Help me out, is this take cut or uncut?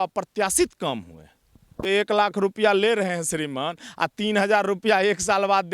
cut